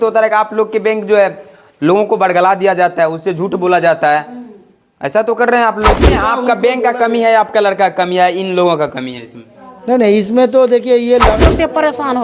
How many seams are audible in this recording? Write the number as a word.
two